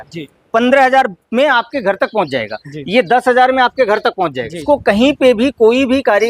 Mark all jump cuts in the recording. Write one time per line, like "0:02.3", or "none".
0:04.6